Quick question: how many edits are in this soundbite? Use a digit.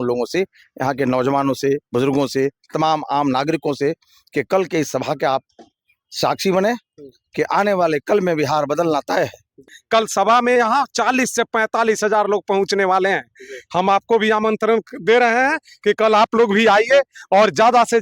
1